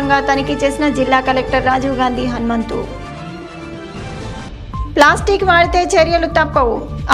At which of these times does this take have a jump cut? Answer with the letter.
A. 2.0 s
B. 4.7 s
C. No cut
C